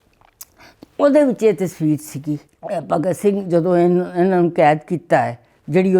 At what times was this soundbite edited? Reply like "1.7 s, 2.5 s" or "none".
2.5 s